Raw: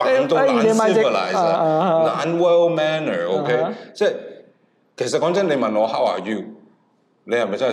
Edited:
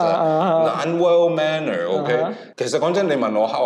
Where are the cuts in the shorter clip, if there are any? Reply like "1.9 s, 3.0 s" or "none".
2.4 s